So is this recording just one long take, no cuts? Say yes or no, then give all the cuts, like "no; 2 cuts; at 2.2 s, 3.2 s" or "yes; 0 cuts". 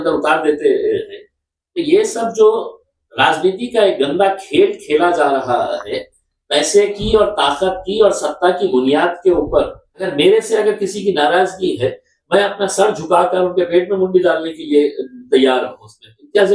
no; 1 cut; at 10.1 s